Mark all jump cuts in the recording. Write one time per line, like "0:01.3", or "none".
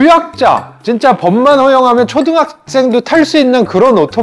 none